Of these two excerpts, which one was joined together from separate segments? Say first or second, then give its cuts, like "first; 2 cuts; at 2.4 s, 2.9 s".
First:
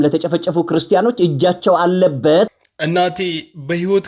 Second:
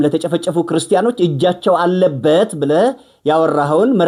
first; 1 cut; at 2.5 s